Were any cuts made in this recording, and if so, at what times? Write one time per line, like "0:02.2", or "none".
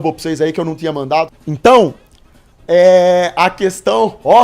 0:01.4